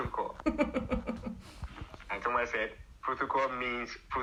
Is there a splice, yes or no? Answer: no